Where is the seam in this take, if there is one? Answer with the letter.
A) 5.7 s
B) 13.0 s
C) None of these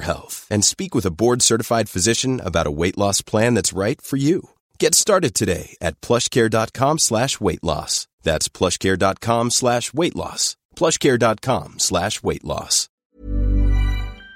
B